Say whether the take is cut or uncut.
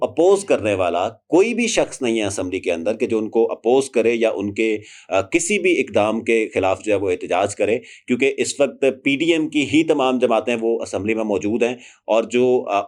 uncut